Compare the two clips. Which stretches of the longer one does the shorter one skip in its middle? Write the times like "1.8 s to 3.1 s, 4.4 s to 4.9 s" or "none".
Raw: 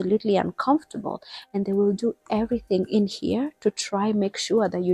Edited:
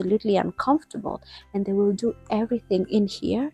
none